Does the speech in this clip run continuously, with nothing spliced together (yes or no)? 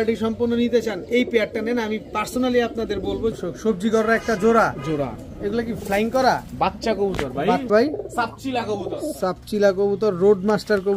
no